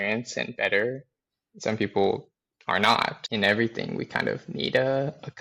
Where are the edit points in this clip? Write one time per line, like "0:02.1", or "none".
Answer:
0:03.2